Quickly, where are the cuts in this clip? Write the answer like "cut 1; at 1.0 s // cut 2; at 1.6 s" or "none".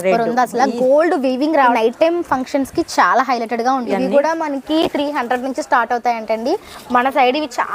cut 1; at 1.7 s // cut 2; at 3.9 s